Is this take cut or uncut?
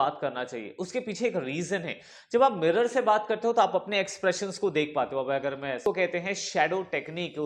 cut